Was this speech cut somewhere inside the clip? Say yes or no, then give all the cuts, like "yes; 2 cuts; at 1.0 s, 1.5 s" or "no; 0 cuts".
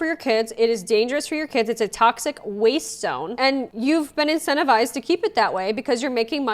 no; 0 cuts